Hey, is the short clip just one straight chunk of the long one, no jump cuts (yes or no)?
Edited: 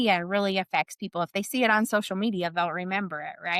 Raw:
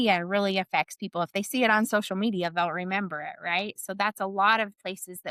yes